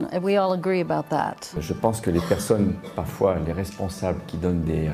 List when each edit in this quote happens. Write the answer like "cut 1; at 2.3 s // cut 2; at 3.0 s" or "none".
cut 1; at 1.5 s